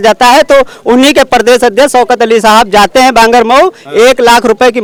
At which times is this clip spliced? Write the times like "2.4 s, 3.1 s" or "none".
none